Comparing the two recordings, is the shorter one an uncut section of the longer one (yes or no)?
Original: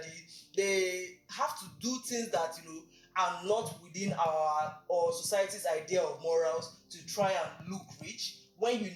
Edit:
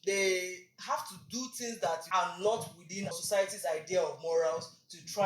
no